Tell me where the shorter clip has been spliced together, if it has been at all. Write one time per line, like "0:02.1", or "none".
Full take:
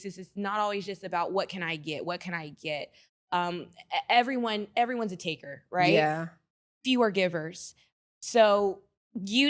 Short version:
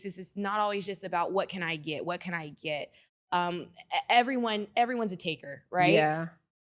none